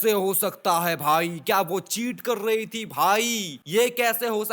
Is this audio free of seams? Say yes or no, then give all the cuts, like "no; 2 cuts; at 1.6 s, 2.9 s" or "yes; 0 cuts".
yes; 0 cuts